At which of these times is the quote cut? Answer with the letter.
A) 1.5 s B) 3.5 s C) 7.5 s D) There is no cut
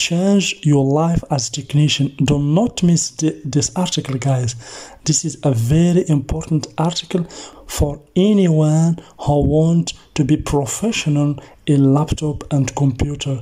C